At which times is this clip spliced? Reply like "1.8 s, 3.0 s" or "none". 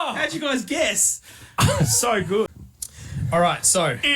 2.5 s